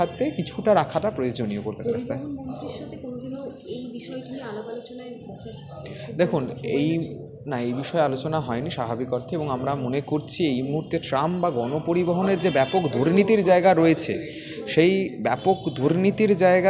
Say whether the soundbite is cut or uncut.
uncut